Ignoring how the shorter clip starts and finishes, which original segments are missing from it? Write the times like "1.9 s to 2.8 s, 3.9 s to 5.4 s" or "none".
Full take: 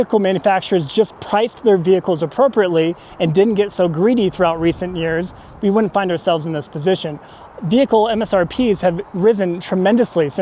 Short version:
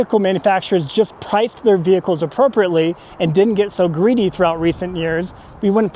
none